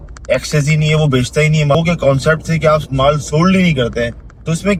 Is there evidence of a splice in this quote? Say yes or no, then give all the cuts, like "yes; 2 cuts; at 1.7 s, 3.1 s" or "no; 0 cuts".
no; 0 cuts